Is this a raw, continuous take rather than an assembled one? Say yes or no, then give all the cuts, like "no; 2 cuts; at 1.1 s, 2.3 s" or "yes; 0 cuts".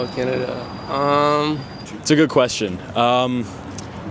no; 1 cut; at 1.9 s